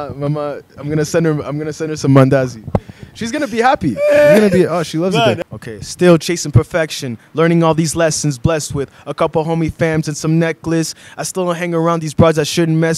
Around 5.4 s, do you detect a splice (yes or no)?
yes